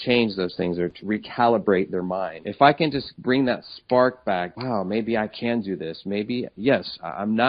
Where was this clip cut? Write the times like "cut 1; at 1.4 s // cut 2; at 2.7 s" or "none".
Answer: cut 1; at 1.0 s // cut 2; at 2.4 s // cut 3; at 3.1 s // cut 4; at 4.5 s